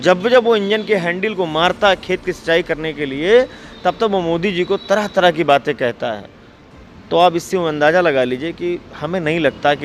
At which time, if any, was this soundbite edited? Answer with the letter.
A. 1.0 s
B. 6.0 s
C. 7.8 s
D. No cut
D